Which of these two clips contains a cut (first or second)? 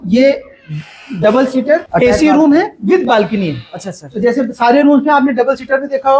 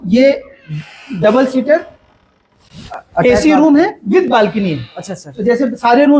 first